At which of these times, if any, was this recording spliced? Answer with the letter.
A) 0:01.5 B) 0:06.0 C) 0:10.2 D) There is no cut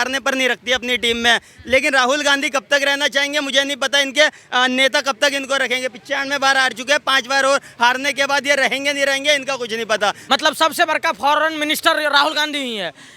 C